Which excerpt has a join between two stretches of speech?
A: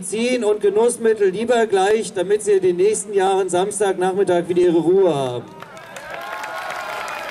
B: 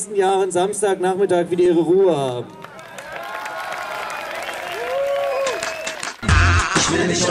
B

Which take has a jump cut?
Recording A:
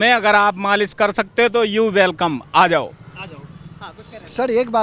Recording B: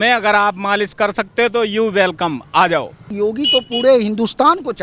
B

